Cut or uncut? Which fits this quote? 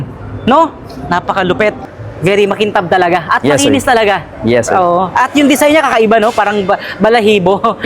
cut